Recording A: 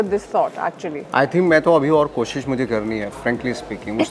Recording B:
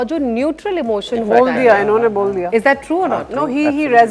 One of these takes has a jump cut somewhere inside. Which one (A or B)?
A